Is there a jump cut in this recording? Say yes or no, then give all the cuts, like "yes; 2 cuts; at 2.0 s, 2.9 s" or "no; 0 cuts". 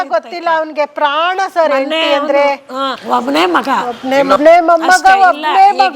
yes; 1 cut; at 3.0 s